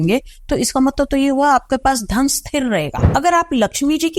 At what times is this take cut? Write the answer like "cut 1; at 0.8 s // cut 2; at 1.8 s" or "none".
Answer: cut 1; at 3.0 s